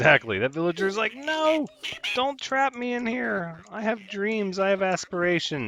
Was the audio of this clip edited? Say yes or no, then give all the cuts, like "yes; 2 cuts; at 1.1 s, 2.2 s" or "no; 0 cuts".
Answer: no; 0 cuts